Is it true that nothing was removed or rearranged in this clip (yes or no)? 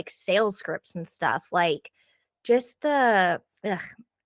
yes